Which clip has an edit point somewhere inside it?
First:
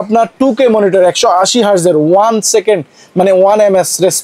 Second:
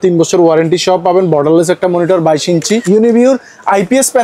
second; 1 cut; at 2.8 s

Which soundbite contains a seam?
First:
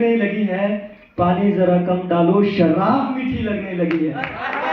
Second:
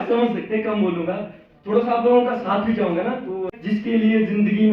second; 1 cut; at 3.5 s

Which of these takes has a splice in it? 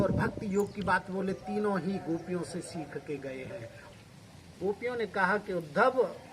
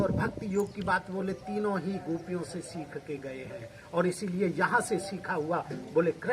first; 1 cut; at 3.7 s

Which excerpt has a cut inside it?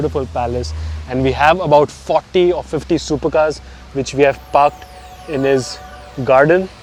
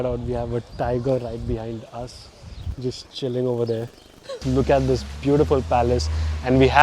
second; 1 cut; at 4.4 s

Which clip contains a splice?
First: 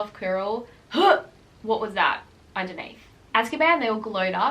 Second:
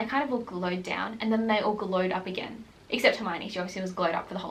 first; 1 cut; at 3.1 s

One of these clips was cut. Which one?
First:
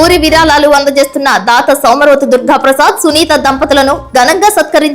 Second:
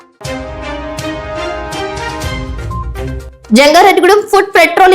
second; 1 cut; at 1.6 s

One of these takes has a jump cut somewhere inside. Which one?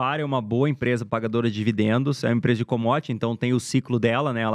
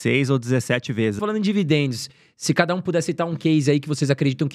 second; 1 cut; at 1.2 s

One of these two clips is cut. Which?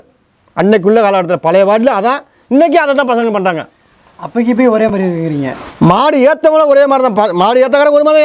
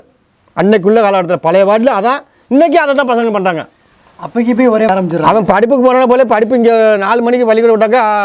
second; 1 cut; at 4.9 s

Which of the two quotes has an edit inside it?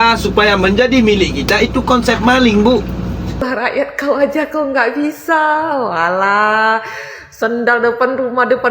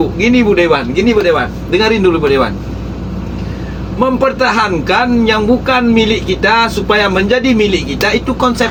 first; 1 cut; at 3.4 s

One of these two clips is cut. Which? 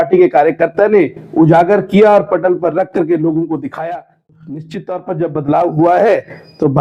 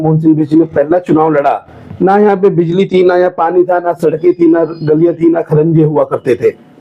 first; 1 cut; at 4.4 s

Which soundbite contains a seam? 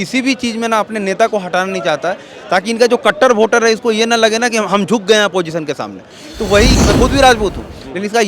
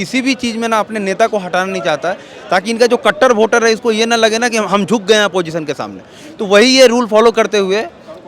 first; 1 cut; at 6.7 s

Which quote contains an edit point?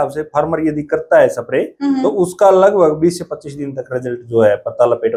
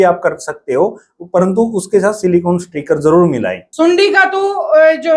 second; 1 cut; at 3.6 s

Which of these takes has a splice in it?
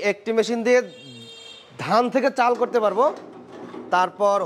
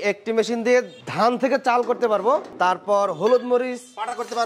second; 2 cuts; at 1.0 s, 2.5 s

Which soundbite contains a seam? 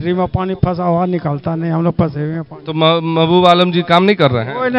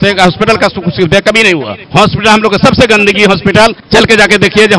second; 2 cuts; at 1.8 s, 3.8 s

